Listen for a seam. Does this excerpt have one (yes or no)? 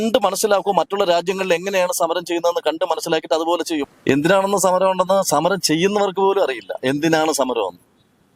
yes